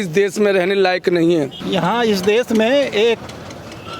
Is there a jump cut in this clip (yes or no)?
yes